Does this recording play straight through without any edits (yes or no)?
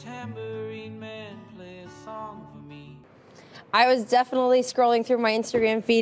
no